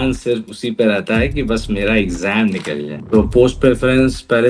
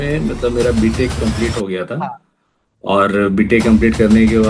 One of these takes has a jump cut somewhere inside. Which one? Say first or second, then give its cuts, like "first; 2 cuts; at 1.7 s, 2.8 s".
first; 1 cut; at 2.9 s